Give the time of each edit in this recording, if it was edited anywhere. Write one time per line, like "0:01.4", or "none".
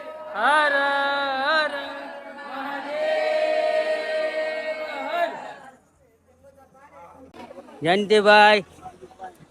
0:07.3